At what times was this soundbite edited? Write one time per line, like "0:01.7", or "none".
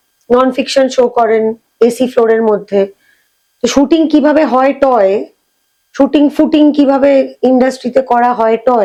none